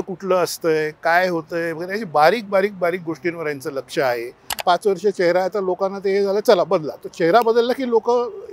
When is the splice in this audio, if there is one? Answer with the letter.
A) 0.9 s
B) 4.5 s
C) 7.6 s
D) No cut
B